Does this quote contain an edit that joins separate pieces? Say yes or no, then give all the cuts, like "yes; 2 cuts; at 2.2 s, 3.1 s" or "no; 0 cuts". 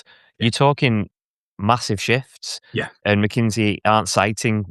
yes; 1 cut; at 3.0 s